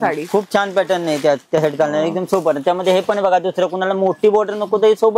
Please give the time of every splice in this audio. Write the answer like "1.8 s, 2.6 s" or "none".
none